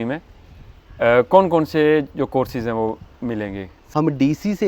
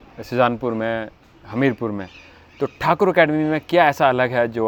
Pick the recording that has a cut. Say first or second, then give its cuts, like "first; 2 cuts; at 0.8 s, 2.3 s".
first; 1 cut; at 3.7 s